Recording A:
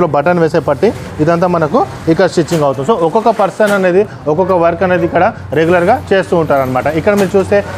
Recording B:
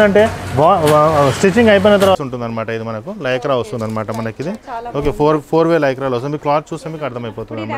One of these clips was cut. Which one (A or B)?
B